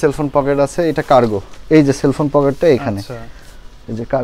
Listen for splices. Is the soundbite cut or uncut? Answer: uncut